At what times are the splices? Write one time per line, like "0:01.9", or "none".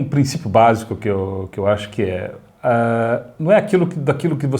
none